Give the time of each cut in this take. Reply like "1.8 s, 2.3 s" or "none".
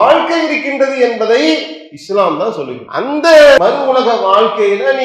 2.8 s, 3.6 s